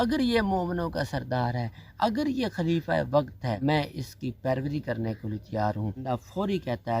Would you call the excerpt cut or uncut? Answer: cut